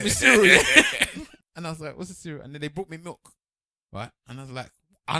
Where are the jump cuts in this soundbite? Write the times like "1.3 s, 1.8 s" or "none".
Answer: 1.3 s

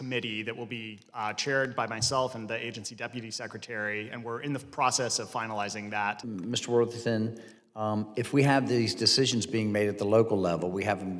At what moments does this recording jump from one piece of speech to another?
none

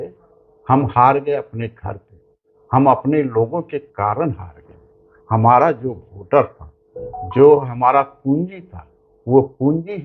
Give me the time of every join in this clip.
none

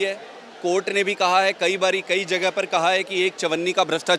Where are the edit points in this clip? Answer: none

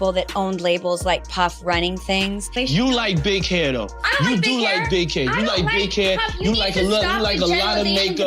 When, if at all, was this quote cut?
2.6 s

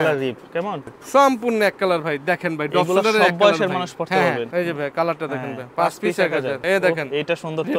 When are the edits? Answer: 1.0 s, 4.5 s, 6.6 s

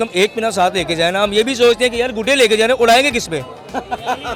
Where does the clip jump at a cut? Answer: none

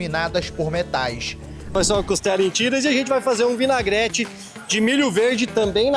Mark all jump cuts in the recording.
1.7 s

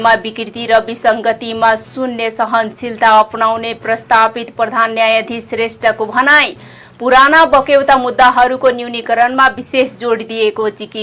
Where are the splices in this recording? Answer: none

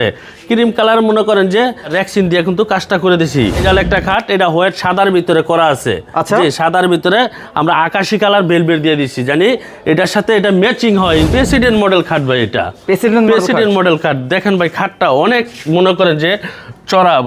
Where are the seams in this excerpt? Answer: 1.9 s, 3.6 s, 11.3 s

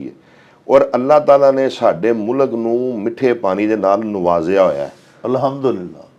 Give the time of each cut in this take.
none

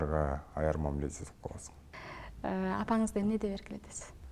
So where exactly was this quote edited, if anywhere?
1.8 s

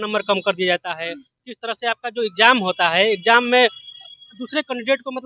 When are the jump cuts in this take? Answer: none

